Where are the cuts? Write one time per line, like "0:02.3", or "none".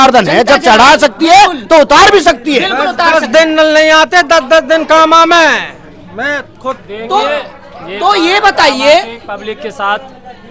none